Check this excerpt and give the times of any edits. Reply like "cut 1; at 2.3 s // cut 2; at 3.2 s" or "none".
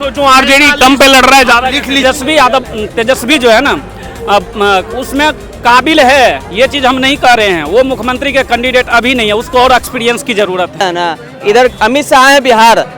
cut 1; at 2.0 s // cut 2; at 10.8 s